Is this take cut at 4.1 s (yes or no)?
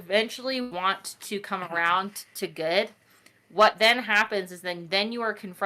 no